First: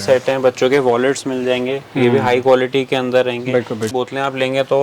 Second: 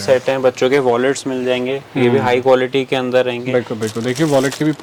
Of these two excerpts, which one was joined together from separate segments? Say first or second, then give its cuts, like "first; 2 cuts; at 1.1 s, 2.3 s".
first; 1 cut; at 3.9 s